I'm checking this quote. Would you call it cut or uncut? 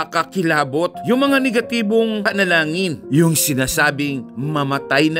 uncut